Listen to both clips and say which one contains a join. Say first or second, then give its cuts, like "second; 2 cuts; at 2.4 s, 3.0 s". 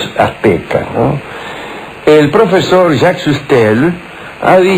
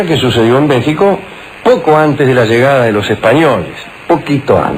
second; 1 cut; at 3.3 s